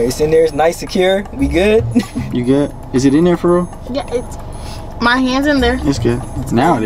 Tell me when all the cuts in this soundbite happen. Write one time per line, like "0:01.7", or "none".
none